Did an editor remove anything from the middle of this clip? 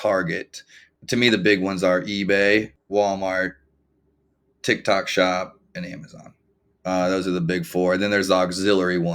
yes; 2 cuts; at 0.9 s, 2.8 s

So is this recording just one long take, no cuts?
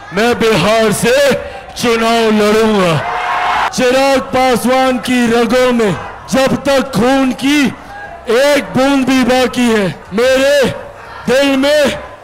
no; 3 cuts; at 3.7 s, 6.1 s, 10.0 s

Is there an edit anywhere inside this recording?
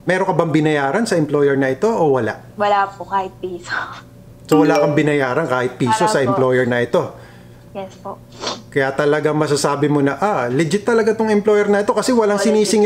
yes; 1 cut; at 2.4 s

